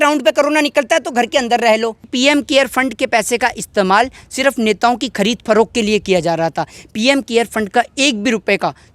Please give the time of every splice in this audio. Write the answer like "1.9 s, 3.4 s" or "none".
2.1 s